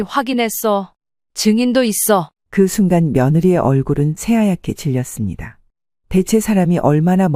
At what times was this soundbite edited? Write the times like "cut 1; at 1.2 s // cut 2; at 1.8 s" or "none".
none